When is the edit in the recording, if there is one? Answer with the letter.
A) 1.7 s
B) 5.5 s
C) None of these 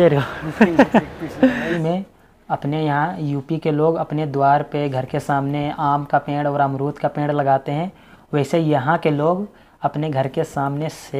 A